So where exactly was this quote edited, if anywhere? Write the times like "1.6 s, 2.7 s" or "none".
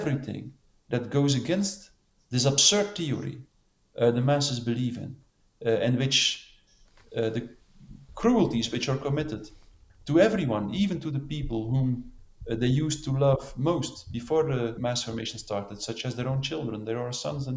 14.8 s